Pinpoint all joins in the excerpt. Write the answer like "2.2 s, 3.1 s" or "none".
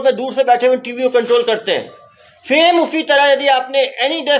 none

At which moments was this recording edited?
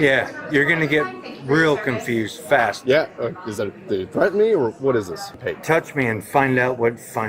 5.3 s

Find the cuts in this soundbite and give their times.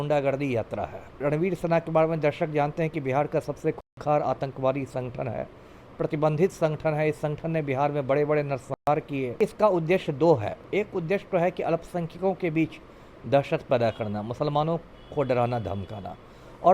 1.1 s, 9.3 s, 10.6 s

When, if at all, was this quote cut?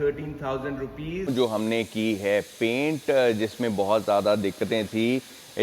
1.3 s

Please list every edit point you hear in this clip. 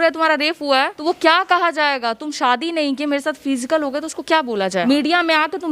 0.9 s, 4.8 s

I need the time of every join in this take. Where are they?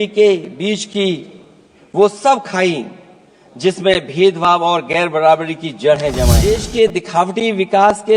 6.5 s

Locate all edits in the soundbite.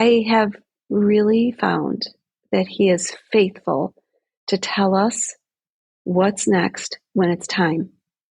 none

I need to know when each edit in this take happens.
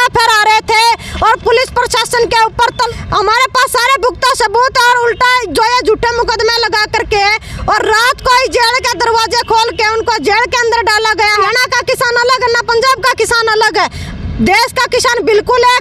2.9 s, 11.4 s

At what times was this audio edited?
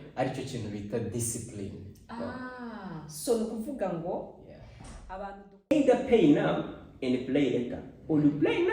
5.7 s

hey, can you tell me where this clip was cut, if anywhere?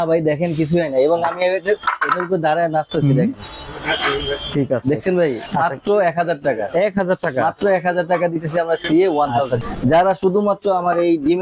5.4 s, 9.6 s

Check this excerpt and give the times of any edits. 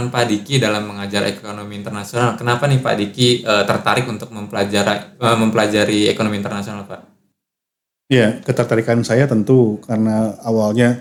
none

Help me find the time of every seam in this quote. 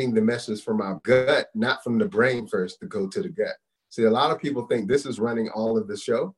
1.0 s

